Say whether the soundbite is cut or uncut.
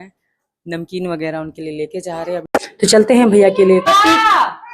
cut